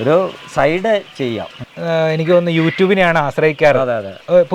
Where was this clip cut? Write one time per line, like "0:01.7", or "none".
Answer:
0:01.6